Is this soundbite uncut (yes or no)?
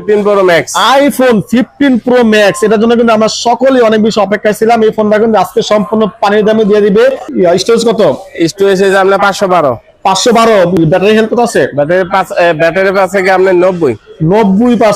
yes